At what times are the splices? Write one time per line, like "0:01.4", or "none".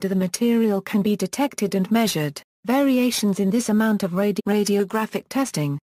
none

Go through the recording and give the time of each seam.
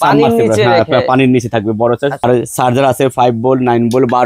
0:02.2

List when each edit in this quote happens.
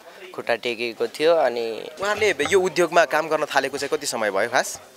0:01.9

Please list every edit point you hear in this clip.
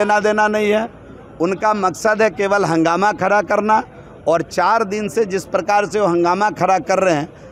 none

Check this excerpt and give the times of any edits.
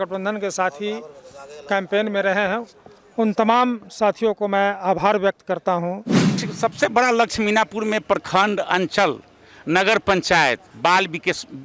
0:06.4

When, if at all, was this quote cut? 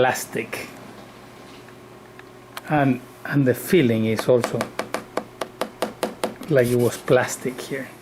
none

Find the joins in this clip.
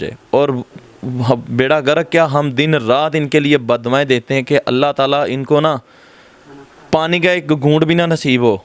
none

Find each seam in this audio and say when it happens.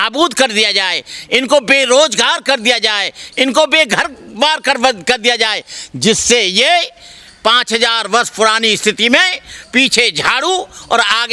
none

